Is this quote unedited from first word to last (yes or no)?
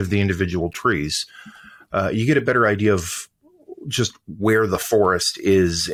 yes